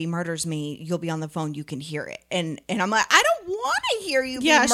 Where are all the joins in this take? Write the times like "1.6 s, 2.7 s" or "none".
none